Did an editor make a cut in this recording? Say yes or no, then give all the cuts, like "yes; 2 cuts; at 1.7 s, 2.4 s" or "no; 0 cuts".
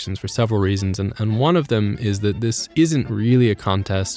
yes; 1 cut; at 2.6 s